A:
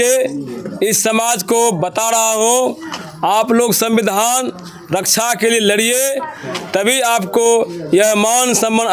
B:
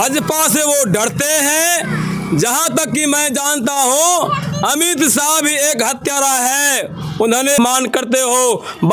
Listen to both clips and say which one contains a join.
B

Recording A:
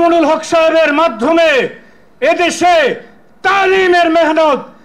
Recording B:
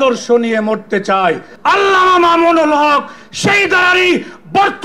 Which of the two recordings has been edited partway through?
B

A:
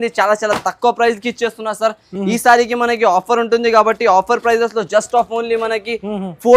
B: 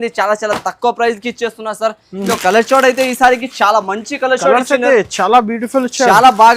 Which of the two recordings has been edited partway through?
B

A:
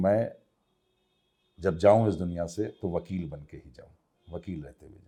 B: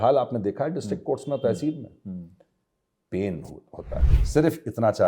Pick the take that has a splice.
B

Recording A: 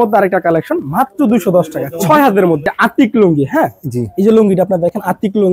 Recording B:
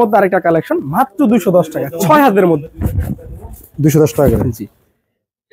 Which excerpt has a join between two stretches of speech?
A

